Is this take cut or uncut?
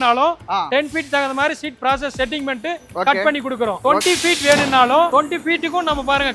cut